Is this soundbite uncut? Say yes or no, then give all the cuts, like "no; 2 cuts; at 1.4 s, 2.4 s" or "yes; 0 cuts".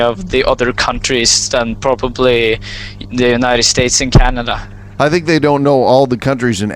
no; 1 cut; at 4.9 s